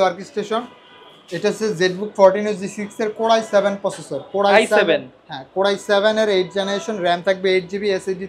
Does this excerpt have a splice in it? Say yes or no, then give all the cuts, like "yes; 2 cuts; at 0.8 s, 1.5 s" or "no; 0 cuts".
no; 0 cuts